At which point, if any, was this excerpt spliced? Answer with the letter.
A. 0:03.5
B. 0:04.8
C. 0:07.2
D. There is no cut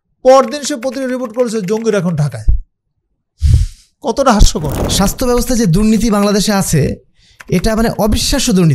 B